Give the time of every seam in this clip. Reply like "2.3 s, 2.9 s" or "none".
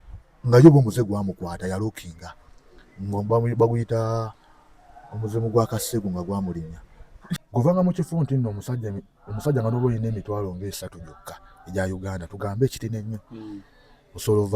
7.4 s

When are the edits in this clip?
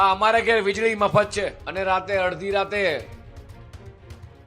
1.6 s

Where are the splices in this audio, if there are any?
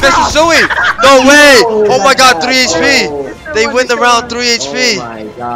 none

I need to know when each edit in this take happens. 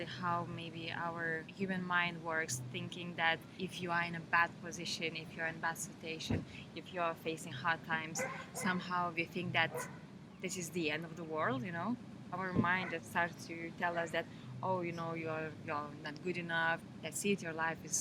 none

